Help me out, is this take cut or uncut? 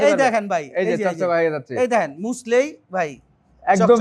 uncut